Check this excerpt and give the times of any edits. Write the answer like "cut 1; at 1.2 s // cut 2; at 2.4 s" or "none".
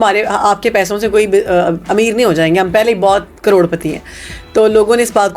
none